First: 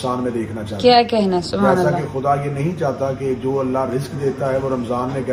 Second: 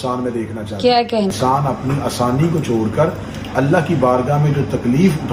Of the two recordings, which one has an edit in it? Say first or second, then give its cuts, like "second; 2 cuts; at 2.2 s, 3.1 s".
second; 1 cut; at 1.3 s